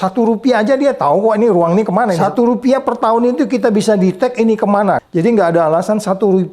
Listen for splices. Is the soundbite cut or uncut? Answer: cut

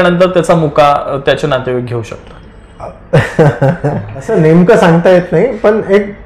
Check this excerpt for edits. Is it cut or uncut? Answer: cut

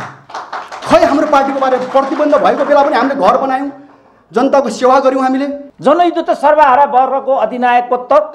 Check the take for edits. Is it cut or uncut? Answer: cut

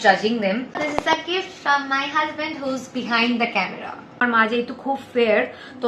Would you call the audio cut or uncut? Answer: cut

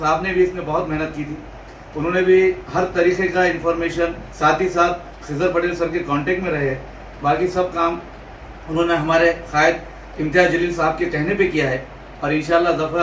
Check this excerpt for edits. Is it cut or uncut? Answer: cut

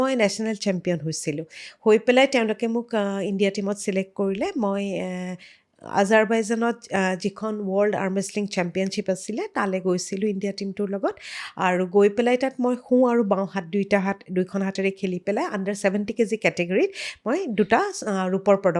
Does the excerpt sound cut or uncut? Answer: uncut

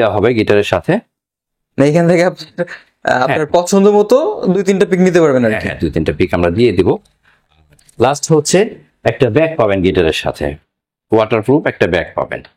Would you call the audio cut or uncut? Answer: uncut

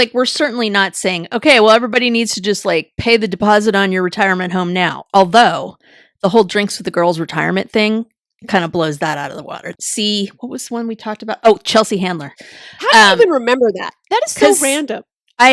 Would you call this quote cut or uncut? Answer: cut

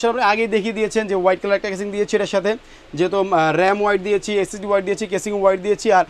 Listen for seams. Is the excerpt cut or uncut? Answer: uncut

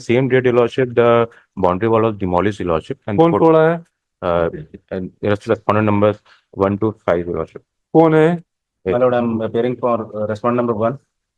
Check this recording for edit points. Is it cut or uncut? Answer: uncut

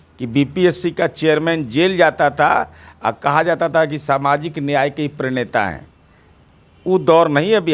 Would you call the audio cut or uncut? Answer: uncut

